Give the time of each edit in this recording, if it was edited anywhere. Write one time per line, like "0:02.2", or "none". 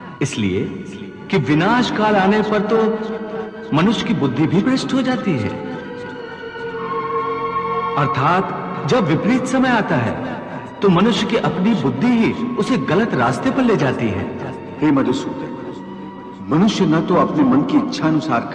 none